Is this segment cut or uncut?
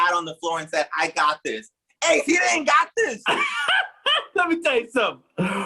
uncut